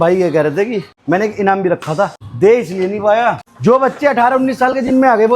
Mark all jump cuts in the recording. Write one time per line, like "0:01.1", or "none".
0:00.9
0:02.2
0:03.5